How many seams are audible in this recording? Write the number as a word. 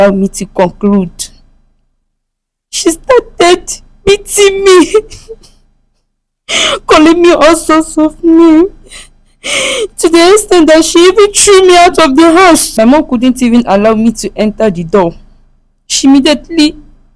one